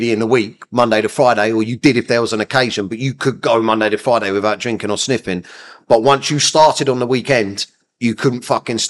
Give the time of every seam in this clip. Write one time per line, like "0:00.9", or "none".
none

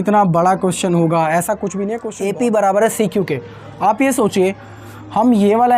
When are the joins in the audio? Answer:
0:02.0

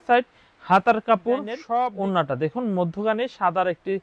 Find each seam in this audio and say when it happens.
0:01.6

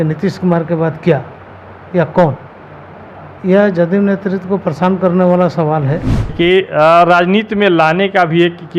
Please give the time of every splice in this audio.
0:06.3

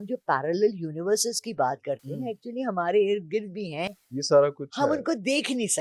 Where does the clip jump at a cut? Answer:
none

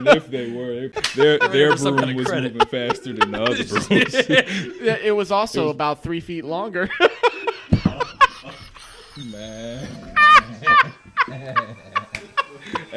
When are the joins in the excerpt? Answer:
0:01.0

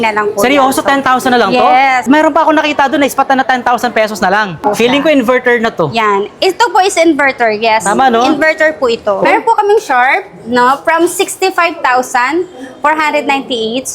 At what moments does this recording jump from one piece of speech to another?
0:02.0
0:04.6
0:09.2

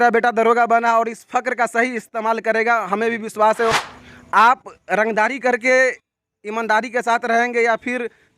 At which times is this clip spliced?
0:03.7

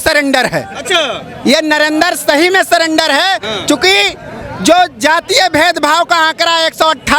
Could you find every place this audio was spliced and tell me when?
none

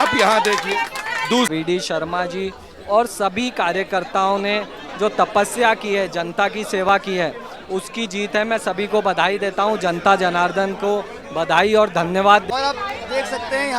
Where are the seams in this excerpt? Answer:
0:01.5
0:12.5

